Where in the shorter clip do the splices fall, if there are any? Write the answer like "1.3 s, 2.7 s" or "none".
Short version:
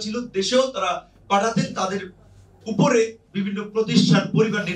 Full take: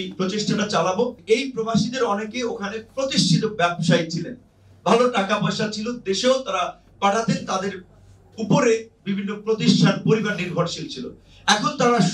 none